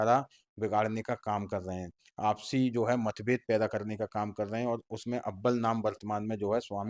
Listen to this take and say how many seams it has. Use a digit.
0